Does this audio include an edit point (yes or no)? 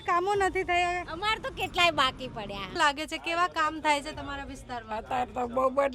yes